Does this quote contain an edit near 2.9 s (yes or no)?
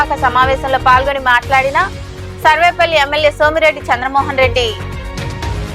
no